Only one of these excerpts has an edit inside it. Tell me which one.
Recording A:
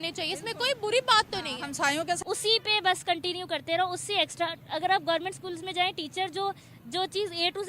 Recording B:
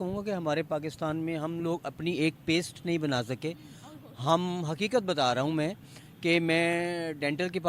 A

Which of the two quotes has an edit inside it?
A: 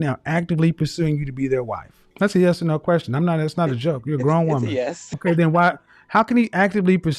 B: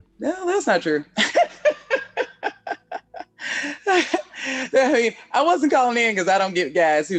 A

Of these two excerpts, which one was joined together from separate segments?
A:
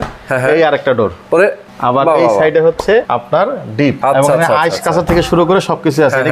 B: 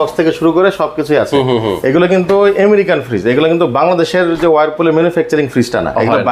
A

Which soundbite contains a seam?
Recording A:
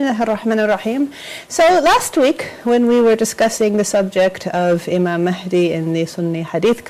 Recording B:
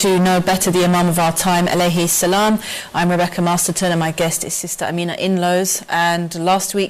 B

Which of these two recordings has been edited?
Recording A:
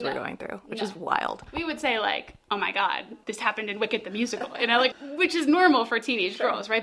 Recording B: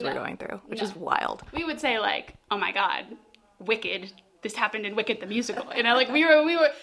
A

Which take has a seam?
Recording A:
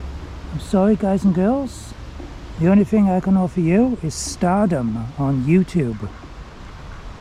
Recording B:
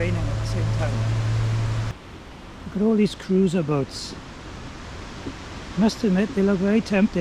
B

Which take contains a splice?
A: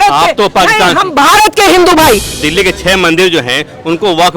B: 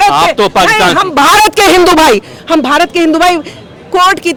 A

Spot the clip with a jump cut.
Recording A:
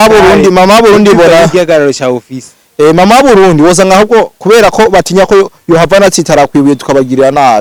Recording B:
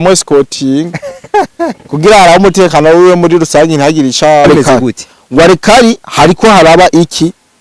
B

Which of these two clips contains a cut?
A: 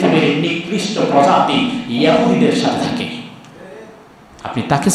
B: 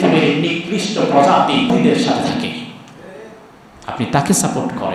B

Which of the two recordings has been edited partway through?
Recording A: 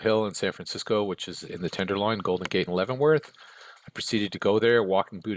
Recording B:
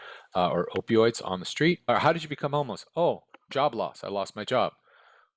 B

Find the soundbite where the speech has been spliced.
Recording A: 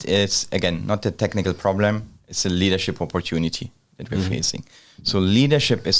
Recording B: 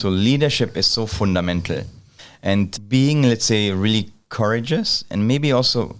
B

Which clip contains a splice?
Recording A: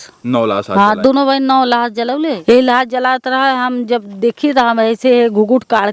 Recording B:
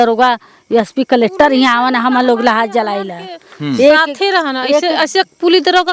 A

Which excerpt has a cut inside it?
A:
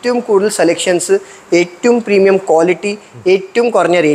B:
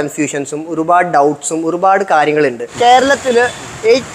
B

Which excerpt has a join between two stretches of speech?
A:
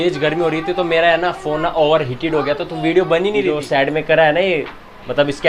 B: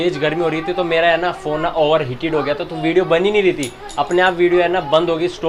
A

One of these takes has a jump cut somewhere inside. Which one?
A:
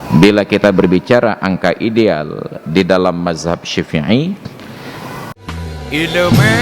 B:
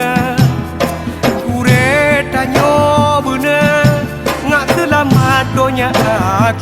A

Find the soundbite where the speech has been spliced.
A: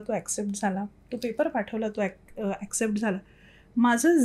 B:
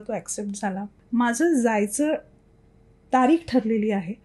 B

